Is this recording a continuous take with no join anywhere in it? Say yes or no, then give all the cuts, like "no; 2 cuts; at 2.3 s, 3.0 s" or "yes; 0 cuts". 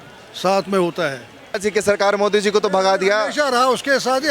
no; 1 cut; at 1.6 s